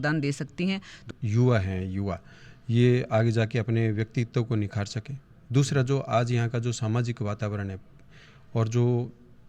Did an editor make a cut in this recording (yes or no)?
yes